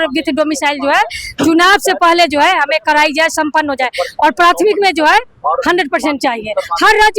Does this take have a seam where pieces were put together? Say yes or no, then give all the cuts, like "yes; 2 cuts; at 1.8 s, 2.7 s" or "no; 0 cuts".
no; 0 cuts